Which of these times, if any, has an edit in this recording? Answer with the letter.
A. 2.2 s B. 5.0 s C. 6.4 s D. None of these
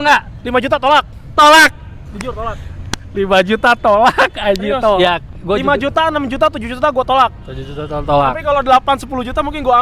B